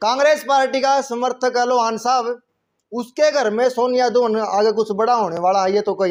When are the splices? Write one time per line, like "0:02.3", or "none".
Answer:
none